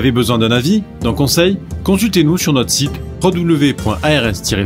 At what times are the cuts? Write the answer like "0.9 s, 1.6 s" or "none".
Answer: none